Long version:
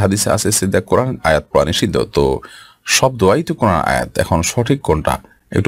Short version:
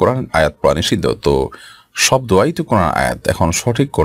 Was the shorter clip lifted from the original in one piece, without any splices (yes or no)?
yes